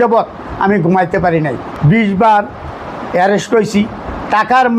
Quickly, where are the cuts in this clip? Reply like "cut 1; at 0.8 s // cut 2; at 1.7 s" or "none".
cut 1; at 1.7 s